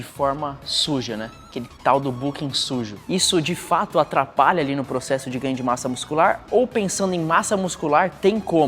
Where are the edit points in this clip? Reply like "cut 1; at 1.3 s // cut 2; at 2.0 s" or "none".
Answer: cut 1; at 3.0 s